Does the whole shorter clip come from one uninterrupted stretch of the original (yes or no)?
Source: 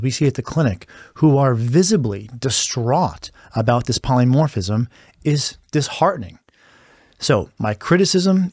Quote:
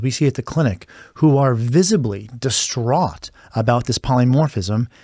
yes